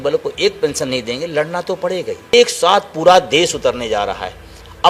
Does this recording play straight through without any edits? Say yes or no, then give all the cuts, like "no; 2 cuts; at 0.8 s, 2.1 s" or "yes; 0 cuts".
no; 1 cut; at 2.3 s